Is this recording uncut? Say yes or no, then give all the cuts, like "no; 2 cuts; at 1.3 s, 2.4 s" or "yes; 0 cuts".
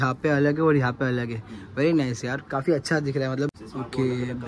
no; 1 cut; at 3.5 s